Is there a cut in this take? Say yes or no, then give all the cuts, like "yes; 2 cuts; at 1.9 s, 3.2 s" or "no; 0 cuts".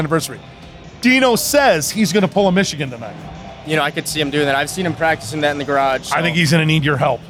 no; 0 cuts